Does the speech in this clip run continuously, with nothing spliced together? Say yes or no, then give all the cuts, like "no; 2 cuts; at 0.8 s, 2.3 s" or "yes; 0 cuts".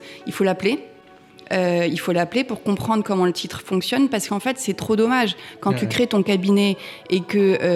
yes; 0 cuts